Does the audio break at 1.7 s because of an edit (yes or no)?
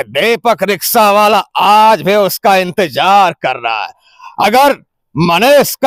no